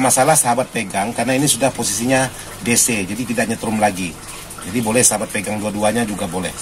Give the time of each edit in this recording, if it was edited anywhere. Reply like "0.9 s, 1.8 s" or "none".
none